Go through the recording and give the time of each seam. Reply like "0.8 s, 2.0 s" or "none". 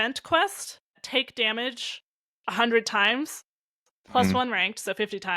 1.0 s